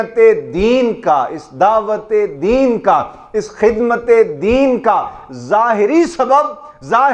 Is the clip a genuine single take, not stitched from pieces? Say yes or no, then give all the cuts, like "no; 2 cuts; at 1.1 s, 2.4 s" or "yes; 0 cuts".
yes; 0 cuts